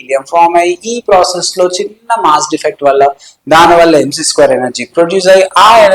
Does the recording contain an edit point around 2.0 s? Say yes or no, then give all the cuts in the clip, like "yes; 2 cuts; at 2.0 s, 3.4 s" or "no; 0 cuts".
no; 0 cuts